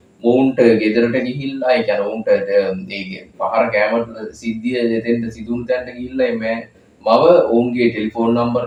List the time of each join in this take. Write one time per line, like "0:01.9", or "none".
none